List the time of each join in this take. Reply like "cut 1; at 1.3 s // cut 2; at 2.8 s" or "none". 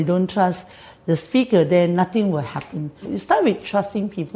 cut 1; at 3.1 s